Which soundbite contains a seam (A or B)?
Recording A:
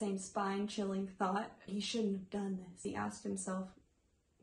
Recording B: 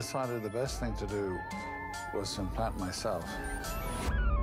A